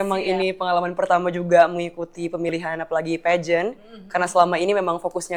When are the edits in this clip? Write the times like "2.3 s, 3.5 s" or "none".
none